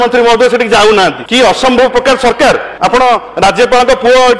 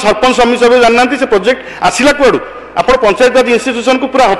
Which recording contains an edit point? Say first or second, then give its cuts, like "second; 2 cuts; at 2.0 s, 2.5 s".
first; 2 cuts; at 1.2 s, 2.7 s